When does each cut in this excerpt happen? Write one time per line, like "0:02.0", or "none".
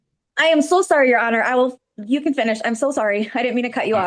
none